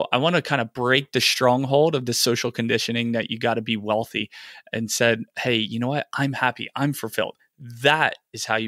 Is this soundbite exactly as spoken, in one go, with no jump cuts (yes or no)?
yes